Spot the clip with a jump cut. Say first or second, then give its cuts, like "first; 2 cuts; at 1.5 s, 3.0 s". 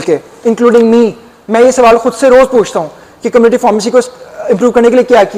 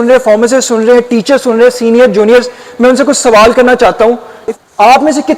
second; 1 cut; at 4.3 s